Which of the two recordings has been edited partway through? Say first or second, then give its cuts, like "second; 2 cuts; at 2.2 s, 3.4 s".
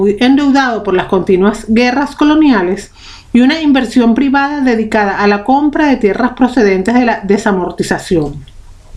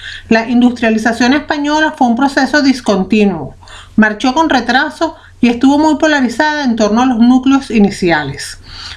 second; 1 cut; at 3.4 s